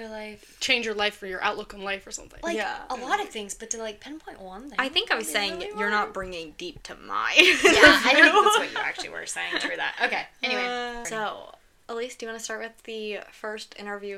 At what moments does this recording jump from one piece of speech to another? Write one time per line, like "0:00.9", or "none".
0:11.0